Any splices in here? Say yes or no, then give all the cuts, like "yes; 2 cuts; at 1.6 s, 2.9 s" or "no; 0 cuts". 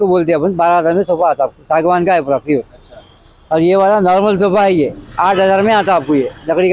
no; 0 cuts